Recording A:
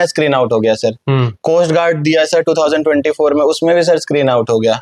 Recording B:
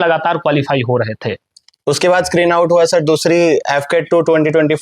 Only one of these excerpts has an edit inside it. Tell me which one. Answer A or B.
B